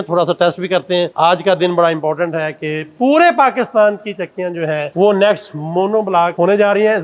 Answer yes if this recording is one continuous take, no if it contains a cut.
yes